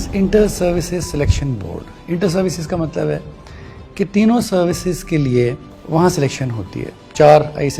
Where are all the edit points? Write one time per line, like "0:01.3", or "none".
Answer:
0:05.7

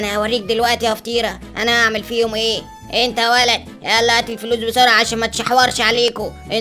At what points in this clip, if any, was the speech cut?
none

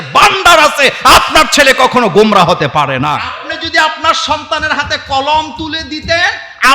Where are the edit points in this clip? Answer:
0:03.3

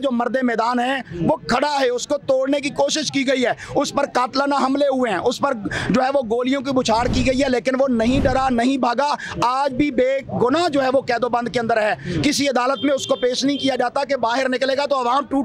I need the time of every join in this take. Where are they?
none

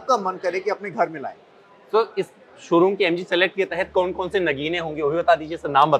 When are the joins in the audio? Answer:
none

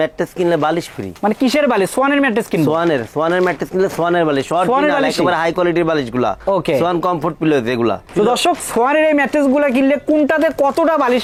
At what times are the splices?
none

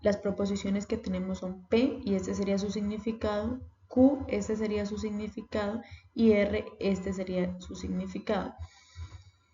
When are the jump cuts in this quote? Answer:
0:04.4

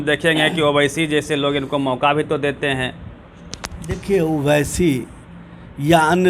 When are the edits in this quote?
none

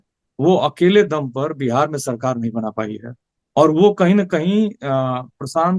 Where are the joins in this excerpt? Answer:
none

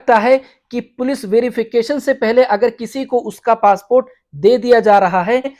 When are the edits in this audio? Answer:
none

